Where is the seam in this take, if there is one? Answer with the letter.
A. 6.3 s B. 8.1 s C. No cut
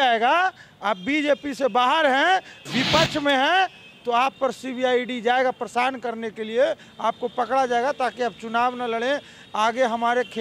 C